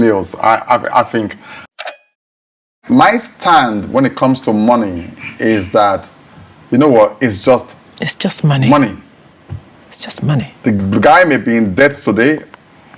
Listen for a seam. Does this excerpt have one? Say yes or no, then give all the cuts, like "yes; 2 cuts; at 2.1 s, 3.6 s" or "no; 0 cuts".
yes; 1 cut; at 1.6 s